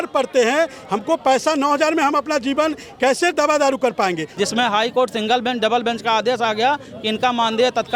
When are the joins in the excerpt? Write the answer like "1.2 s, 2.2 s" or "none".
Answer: 4.2 s